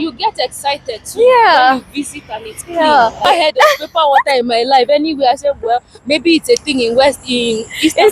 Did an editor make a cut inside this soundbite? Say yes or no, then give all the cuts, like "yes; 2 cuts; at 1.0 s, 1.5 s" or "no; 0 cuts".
yes; 1 cut; at 3.2 s